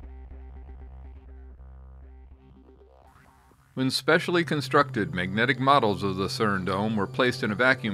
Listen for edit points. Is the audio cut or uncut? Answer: cut